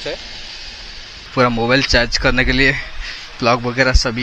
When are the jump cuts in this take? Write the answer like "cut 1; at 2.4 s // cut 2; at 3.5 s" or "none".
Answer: cut 1; at 1.3 s